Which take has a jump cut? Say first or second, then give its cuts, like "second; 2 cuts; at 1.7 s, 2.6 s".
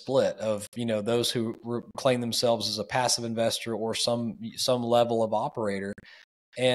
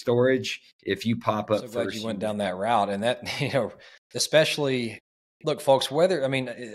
second; 1 cut; at 2.0 s